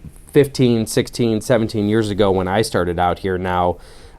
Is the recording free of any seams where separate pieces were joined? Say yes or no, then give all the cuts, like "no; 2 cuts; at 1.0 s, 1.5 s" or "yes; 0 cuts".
yes; 0 cuts